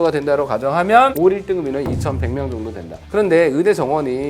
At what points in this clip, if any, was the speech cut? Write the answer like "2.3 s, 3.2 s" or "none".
1.1 s